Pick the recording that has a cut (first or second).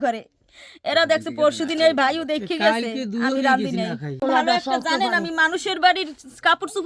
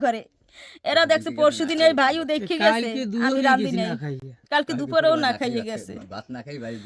first